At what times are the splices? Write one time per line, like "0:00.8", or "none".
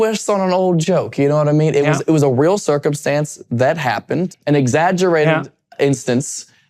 0:04.3